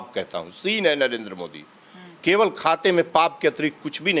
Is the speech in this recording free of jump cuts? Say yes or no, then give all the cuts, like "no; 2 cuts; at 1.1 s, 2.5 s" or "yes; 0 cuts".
yes; 0 cuts